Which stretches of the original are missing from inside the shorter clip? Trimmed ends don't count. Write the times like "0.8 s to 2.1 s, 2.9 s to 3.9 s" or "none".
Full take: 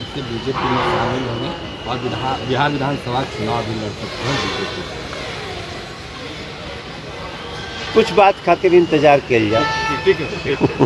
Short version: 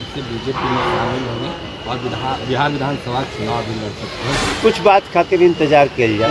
4.5 s to 7.9 s